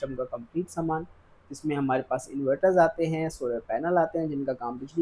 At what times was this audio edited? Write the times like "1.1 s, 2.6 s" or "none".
none